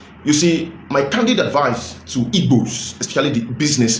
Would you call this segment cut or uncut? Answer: uncut